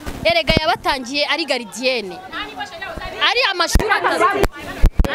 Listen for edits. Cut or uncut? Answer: uncut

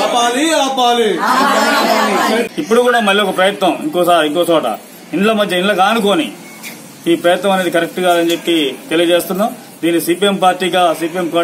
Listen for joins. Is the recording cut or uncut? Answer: cut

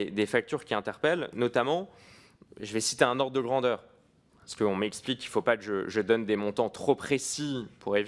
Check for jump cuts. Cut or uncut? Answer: uncut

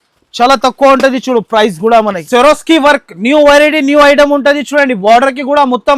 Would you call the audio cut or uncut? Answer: cut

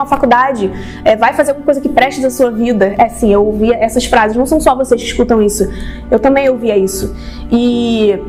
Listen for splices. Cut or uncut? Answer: uncut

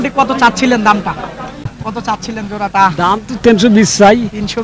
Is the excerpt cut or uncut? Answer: cut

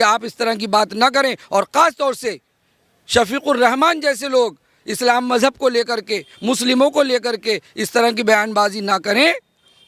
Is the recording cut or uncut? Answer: uncut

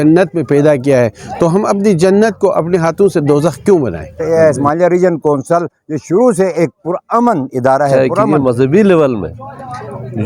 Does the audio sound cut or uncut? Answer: cut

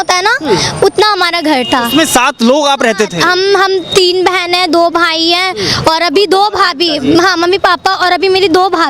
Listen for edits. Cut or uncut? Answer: uncut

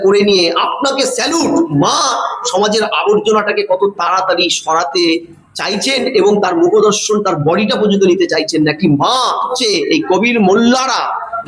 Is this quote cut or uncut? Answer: cut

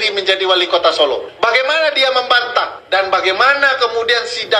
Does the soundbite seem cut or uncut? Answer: cut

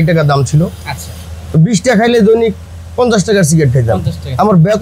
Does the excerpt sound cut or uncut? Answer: uncut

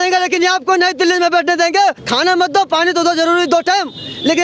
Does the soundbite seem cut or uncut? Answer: cut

